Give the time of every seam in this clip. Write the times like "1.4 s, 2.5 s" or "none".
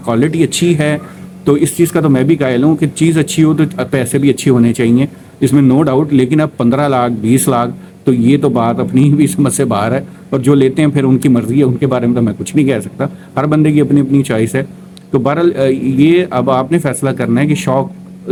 none